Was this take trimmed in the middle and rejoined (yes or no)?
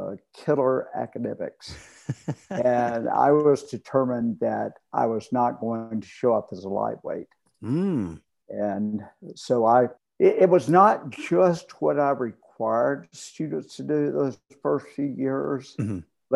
yes